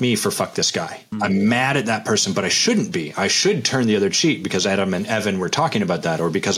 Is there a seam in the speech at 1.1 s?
yes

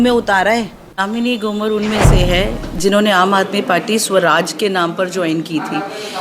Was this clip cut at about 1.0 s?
yes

